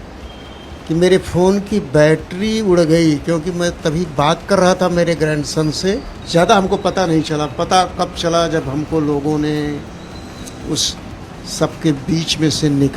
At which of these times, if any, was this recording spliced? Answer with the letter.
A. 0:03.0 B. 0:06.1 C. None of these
B